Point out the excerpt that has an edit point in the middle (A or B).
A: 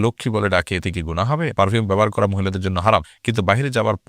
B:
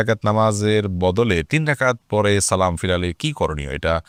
A